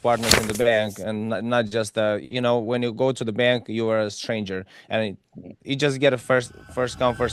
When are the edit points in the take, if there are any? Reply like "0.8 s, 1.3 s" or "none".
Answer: none